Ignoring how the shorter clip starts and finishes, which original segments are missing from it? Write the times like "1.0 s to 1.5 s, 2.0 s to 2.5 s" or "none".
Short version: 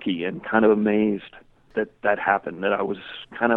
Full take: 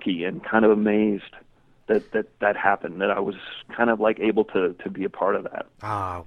1.7 s to 2.1 s